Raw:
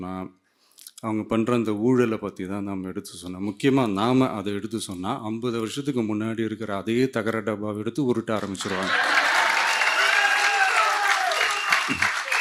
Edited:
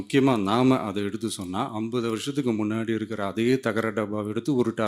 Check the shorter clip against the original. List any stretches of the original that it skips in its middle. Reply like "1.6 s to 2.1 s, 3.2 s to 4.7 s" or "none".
none